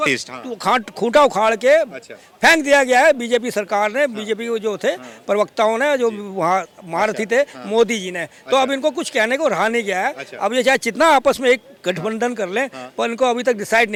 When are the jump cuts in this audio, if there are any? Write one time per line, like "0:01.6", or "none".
none